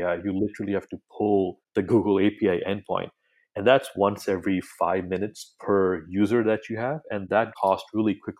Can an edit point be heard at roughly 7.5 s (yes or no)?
yes